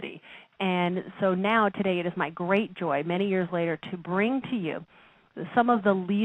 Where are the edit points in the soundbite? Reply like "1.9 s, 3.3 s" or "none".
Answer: 3.3 s